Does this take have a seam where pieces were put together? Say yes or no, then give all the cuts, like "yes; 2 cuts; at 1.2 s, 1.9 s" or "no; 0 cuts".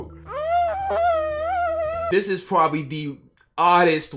yes; 1 cut; at 2.1 s